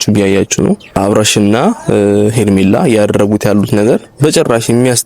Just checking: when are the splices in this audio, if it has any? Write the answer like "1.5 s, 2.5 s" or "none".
1.0 s